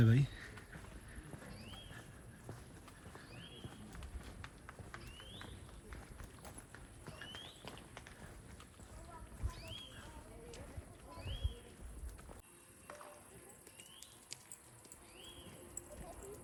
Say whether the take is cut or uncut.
uncut